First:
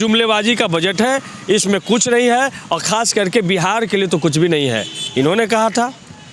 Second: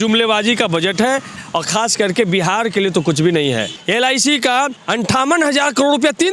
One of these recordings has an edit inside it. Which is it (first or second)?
second